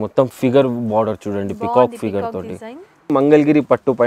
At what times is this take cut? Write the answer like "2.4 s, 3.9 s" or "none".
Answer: 3.1 s